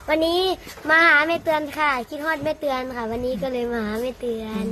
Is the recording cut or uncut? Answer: uncut